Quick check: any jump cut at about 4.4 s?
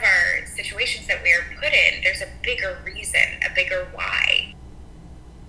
yes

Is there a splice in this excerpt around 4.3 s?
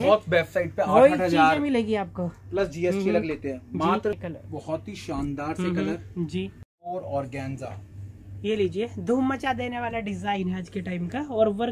yes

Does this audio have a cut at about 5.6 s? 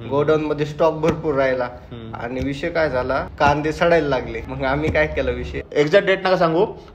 yes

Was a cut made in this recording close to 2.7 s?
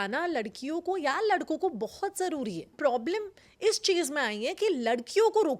yes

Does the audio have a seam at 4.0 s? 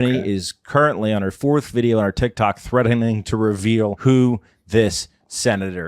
yes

